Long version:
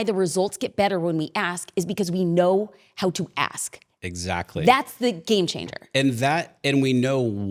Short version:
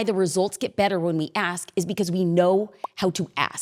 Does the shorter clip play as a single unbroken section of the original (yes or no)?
yes